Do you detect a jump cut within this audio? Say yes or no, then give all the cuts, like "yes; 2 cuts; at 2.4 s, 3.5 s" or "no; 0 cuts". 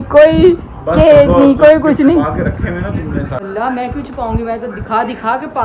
yes; 1 cut; at 3.4 s